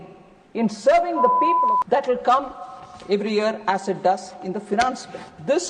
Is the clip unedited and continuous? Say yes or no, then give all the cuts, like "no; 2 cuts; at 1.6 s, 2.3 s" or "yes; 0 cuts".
no; 1 cut; at 1.5 s